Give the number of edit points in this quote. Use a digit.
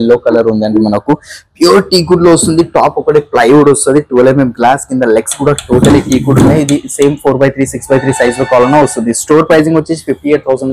0